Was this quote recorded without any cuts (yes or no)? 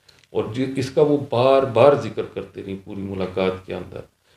yes